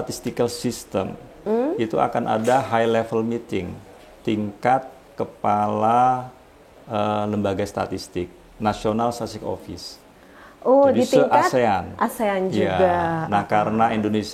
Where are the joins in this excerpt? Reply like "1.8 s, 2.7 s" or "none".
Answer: 1.4 s